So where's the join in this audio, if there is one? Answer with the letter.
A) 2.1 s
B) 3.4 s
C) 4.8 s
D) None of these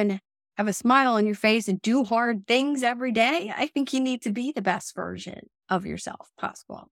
D